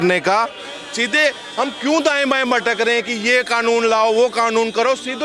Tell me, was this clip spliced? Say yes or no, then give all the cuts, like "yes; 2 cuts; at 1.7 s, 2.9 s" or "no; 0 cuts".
no; 0 cuts